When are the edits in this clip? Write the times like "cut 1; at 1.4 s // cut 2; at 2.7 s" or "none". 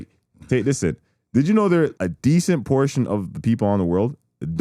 cut 1; at 2.0 s